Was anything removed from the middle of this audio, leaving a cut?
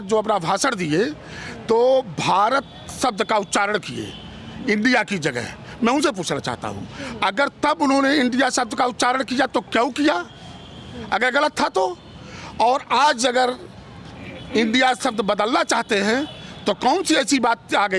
no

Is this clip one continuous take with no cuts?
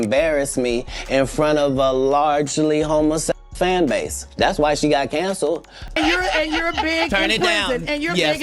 no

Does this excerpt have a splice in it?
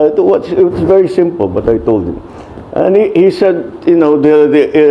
no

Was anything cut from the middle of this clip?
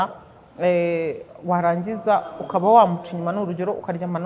no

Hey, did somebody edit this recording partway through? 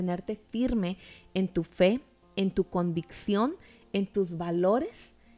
no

